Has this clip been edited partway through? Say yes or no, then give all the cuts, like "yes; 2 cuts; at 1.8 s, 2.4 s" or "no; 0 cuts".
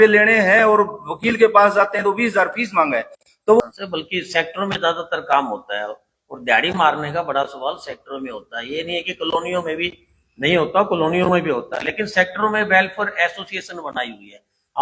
yes; 1 cut; at 3.6 s